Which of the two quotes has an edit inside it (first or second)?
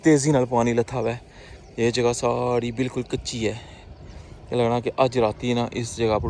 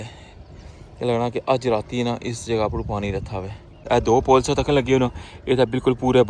second